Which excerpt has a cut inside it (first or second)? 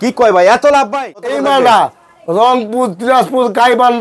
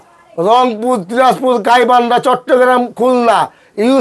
first